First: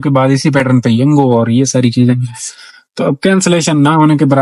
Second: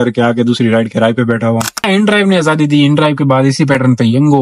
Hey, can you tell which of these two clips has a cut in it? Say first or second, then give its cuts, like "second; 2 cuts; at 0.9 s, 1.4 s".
second; 1 cut; at 1.8 s